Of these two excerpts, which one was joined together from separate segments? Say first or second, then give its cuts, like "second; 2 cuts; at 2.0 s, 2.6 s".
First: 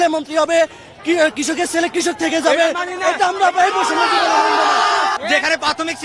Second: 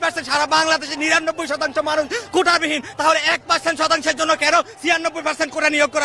first; 1 cut; at 5.2 s